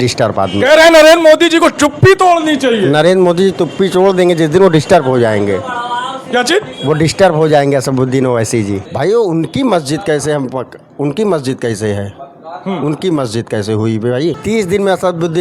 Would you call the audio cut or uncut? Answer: cut